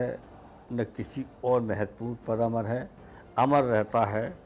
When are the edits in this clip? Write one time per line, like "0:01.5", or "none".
none